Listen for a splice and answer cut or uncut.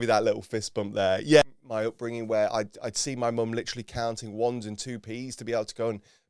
cut